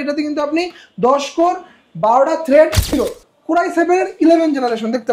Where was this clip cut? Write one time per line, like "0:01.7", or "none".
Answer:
0:02.9